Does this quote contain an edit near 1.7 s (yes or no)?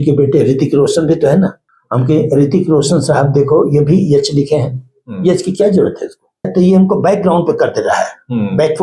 yes